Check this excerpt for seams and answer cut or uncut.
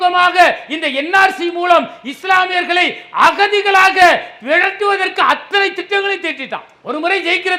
uncut